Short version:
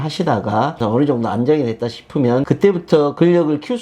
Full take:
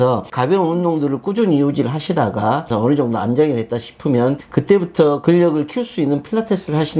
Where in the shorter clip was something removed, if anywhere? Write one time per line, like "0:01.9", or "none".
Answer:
0:02.4